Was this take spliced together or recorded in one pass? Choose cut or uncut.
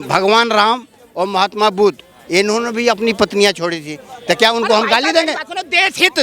uncut